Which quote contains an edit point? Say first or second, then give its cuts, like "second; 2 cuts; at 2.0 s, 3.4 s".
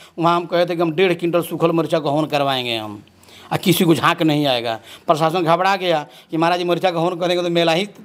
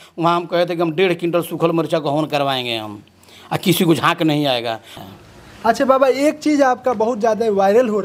second; 1 cut; at 4.9 s